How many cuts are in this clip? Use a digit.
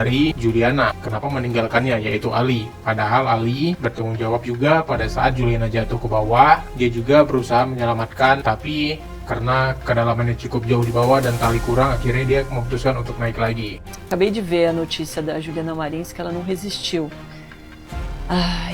0